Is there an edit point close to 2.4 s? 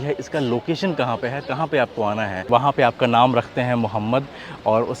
yes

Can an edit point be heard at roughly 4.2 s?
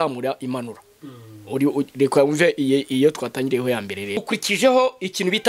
yes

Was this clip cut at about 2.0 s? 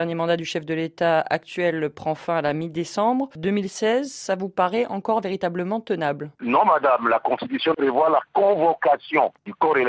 yes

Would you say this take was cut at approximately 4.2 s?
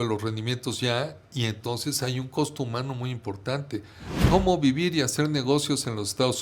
yes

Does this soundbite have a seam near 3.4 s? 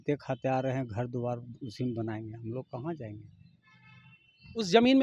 no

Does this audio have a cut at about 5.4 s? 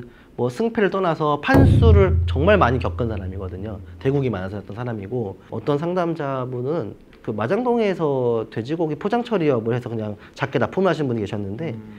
yes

